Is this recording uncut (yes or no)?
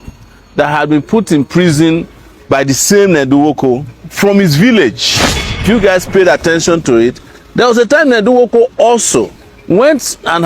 no